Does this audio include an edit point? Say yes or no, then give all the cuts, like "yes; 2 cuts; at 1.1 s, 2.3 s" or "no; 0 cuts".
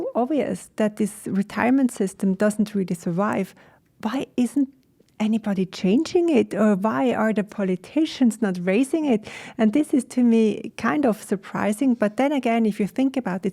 no; 0 cuts